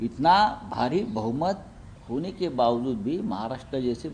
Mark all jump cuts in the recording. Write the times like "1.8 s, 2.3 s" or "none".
none